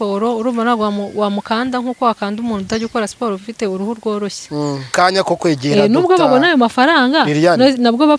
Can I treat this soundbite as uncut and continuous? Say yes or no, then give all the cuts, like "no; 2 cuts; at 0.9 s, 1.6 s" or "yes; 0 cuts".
no; 1 cut; at 4.9 s